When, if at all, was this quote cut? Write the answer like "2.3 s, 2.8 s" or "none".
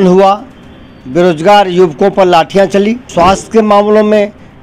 3.0 s